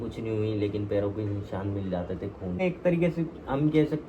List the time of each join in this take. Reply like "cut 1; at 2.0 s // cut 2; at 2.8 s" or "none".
cut 1; at 2.6 s